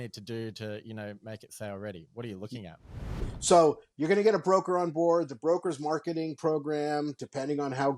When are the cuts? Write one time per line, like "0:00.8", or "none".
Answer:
0:03.1